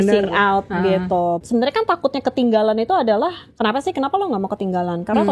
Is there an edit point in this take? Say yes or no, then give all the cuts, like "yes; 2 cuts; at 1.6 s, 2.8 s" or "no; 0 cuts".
yes; 1 cut; at 1.4 s